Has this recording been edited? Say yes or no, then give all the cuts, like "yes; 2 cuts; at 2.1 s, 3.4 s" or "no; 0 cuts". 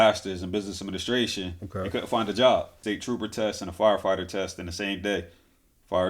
yes; 1 cut; at 2.8 s